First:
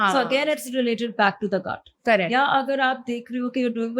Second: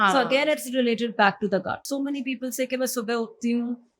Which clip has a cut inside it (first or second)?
second